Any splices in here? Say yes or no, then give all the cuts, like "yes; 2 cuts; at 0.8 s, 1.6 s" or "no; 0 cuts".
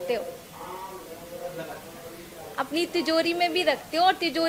no; 0 cuts